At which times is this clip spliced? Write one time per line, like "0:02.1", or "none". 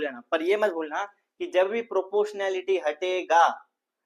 none